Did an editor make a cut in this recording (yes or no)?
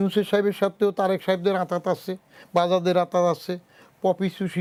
no